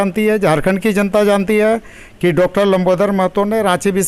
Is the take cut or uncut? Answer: uncut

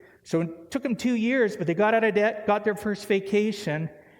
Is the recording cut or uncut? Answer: uncut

